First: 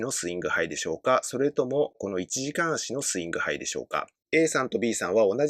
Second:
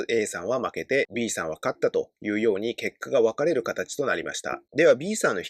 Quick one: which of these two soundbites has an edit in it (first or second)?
first